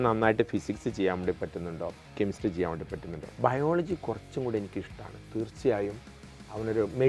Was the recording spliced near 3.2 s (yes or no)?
yes